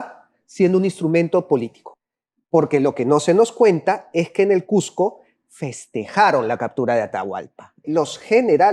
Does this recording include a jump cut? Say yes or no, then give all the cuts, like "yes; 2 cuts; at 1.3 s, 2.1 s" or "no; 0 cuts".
yes; 2 cuts; at 1.8 s, 7.9 s